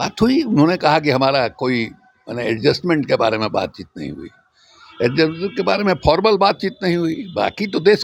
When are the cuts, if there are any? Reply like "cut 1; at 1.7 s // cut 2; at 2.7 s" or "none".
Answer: none

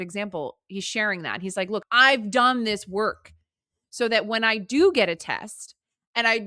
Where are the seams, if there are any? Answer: cut 1; at 1.8 s

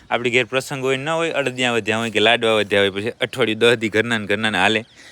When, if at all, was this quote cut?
none

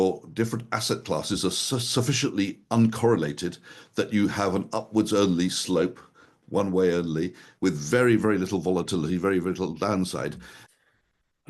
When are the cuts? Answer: cut 1; at 10.5 s

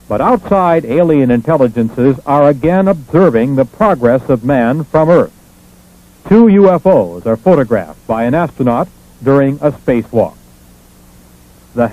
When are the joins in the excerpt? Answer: none

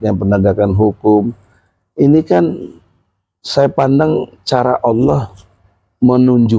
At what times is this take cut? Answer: none

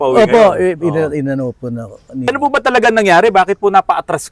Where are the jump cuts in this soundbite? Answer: cut 1; at 2.3 s

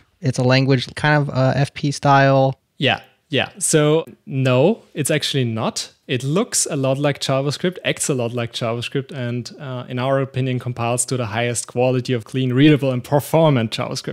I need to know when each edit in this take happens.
cut 1; at 0.9 s

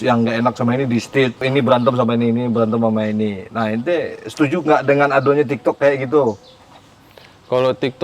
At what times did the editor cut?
cut 1; at 1.5 s

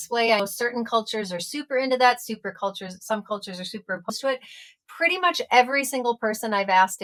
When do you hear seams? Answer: none

